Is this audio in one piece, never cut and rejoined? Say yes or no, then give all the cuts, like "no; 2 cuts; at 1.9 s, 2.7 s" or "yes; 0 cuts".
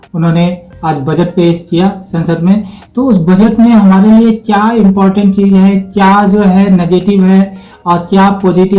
yes; 0 cuts